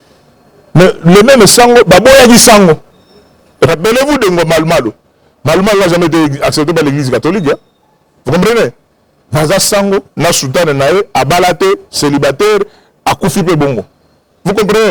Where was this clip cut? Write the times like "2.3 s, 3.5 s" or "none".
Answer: none